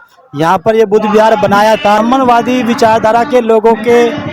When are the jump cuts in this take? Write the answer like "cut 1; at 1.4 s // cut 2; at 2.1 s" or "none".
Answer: cut 1; at 2.0 s